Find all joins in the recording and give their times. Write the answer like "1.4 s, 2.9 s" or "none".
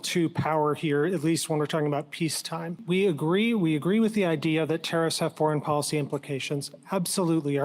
2.8 s